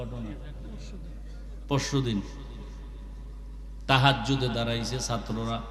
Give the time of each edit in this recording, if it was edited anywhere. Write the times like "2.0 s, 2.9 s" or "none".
none